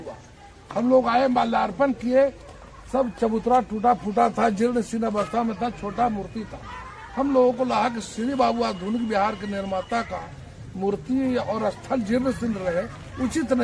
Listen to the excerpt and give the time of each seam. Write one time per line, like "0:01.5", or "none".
none

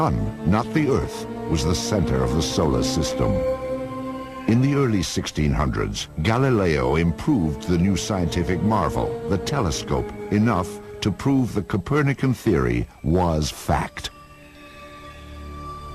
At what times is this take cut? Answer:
none

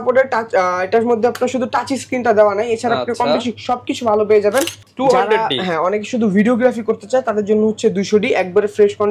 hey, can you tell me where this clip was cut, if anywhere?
0:04.8

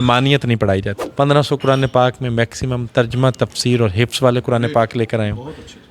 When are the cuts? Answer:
0:01.0

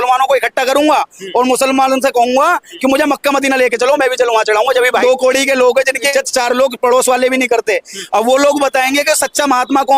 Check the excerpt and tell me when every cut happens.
0:05.0
0:06.1

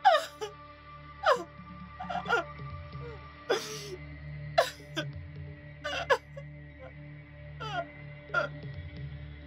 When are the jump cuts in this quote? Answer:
0:08.5

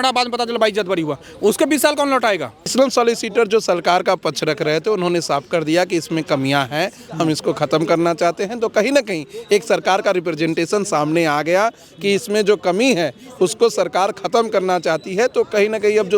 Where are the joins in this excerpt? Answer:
0:02.7

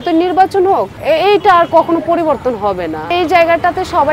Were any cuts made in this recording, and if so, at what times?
0:00.9
0:03.1

